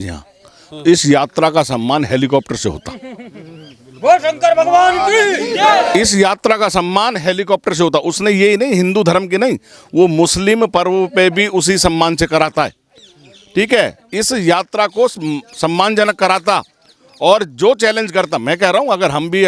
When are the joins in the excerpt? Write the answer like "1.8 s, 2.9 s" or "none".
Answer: none